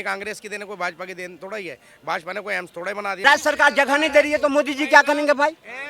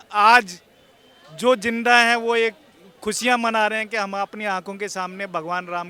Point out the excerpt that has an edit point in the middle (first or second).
first